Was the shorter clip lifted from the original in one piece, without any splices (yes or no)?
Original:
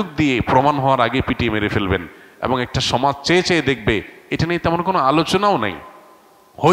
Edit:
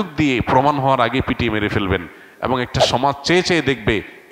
yes